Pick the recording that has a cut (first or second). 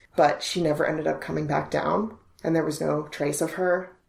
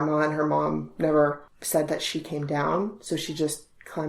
second